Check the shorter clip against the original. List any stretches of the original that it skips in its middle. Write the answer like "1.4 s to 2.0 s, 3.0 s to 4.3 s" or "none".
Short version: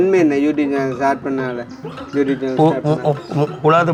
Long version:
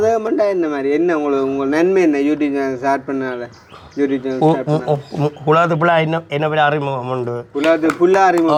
none